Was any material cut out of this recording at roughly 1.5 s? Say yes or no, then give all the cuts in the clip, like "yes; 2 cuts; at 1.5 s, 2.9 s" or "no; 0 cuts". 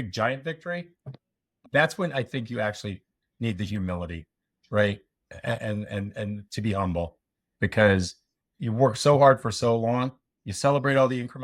yes; 1 cut; at 1.5 s